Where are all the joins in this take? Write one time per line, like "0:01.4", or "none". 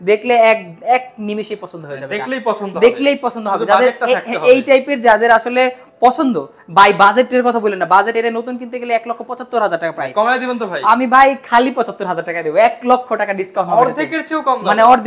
none

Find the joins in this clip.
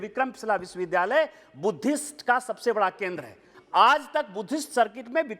0:03.5

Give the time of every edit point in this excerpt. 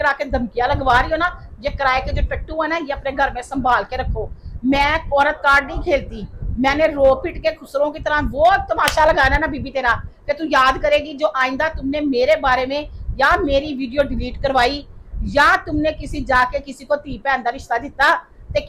none

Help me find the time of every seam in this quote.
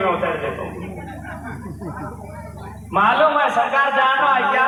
none

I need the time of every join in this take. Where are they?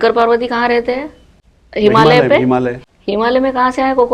0:02.8

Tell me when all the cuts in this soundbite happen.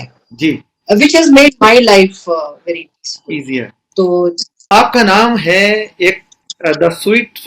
0:04.5

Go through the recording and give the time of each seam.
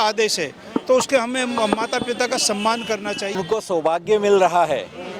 0:03.4

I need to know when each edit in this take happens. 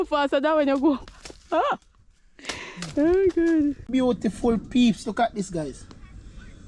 0:03.9

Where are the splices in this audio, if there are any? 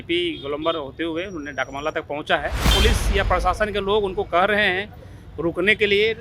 0:02.6

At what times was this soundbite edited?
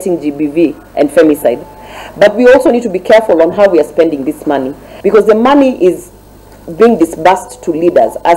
0:04.9

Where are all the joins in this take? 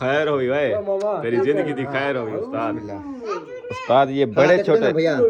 none

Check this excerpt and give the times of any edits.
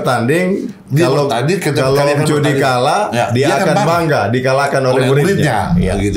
none

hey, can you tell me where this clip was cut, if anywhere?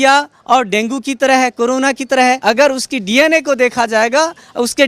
0:02.4

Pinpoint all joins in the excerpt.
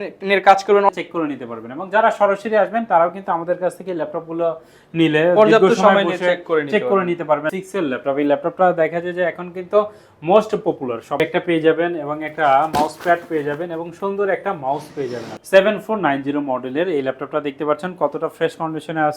0:00.9
0:07.5
0:11.2
0:15.3

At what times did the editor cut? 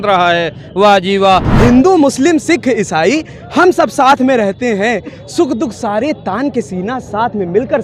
0:01.5

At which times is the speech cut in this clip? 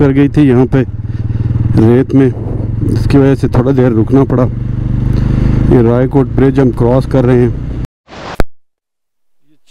0:07.9

